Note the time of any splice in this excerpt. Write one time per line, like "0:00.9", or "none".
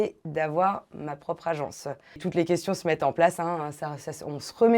0:02.2